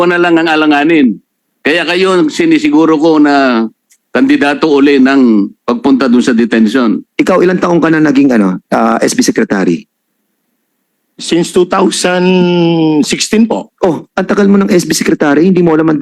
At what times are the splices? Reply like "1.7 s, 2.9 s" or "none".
7.0 s